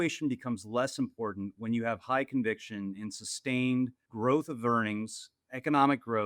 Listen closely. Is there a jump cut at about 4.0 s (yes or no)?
yes